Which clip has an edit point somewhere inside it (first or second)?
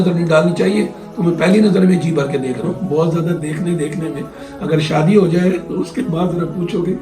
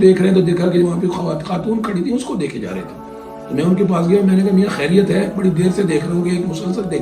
first